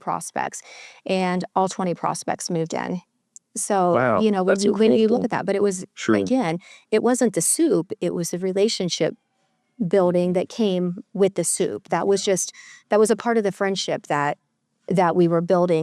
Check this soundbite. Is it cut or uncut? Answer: uncut